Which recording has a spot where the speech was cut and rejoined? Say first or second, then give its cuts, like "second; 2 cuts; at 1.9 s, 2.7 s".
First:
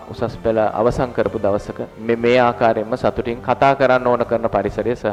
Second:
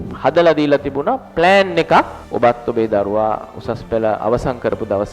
second; 1 cut; at 2.2 s